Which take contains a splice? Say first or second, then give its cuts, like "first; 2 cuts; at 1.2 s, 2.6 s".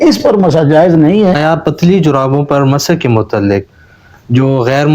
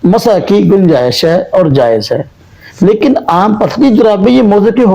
first; 1 cut; at 1.4 s